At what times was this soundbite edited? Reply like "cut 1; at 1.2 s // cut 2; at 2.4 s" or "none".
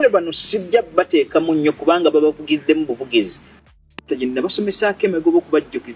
cut 1; at 3.7 s

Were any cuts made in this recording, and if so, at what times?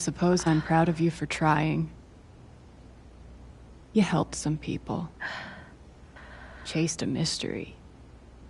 cut 1; at 1.9 s // cut 2; at 3.9 s // cut 3; at 7.7 s

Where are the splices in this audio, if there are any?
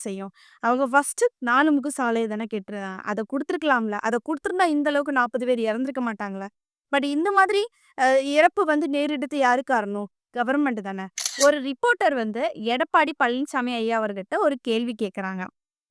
cut 1; at 11.4 s

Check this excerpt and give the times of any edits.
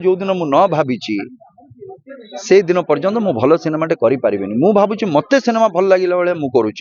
none

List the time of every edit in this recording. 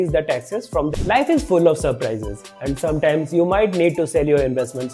cut 1; at 1.0 s

